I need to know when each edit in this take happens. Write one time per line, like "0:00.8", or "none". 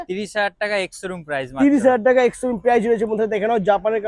none